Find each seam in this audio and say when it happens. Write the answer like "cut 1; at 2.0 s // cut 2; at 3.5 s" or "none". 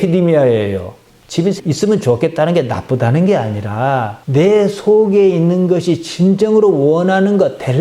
none